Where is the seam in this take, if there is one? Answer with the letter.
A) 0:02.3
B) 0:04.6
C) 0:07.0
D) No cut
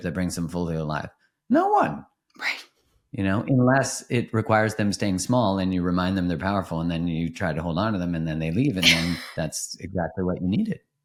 D